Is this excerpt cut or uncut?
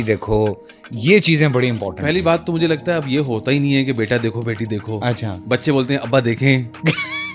uncut